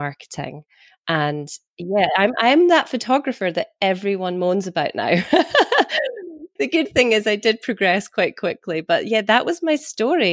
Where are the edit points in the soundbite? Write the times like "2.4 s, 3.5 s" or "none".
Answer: 1.9 s, 6.0 s